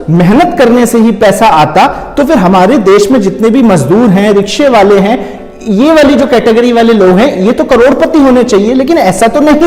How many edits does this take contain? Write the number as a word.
zero